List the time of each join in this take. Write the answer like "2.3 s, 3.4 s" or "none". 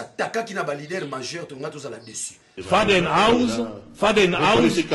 2.5 s